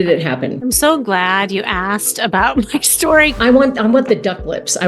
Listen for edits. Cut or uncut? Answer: cut